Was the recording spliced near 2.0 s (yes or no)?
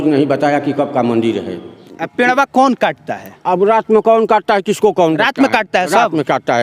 yes